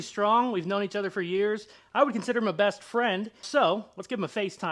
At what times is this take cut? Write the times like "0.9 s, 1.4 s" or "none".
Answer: 3.4 s